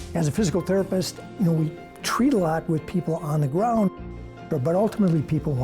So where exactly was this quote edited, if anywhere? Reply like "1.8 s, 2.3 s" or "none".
1.3 s, 4.5 s